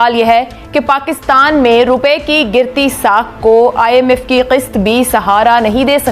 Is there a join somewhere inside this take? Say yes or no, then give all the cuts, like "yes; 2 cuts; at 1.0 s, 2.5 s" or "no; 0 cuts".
no; 0 cuts